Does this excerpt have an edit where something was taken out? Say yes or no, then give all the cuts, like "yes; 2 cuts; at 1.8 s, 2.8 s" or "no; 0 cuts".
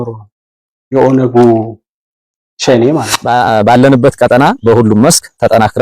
yes; 1 cut; at 3.1 s